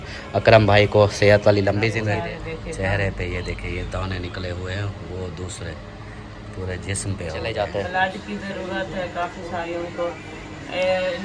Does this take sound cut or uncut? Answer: cut